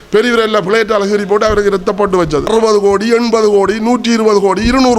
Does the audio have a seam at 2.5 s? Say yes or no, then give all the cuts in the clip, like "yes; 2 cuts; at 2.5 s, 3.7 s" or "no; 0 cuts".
yes; 1 cut; at 2.5 s